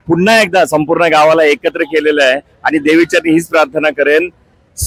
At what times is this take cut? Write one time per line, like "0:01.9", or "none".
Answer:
none